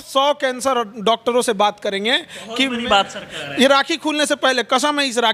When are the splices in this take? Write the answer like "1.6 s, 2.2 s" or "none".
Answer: none